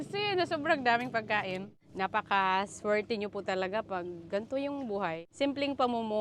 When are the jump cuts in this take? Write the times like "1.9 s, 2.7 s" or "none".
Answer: 1.8 s, 5.2 s